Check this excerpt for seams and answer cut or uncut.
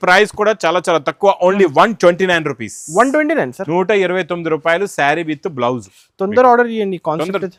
uncut